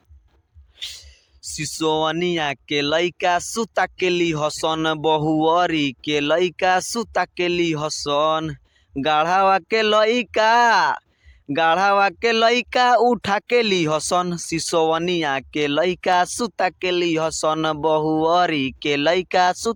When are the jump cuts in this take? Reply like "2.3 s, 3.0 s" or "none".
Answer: none